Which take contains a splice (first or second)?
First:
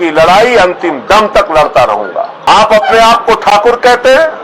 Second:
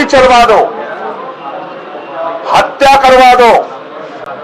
first